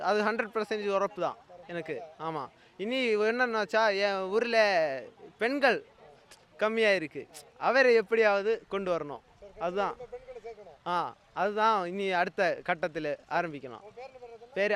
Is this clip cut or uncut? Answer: uncut